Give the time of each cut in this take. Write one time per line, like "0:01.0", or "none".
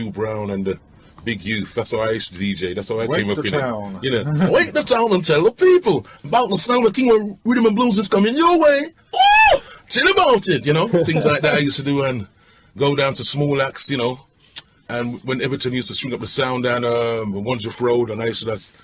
none